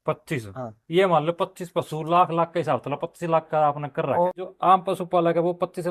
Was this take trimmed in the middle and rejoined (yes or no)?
yes